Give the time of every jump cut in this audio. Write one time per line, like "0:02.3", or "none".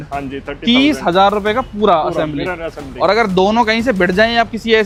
none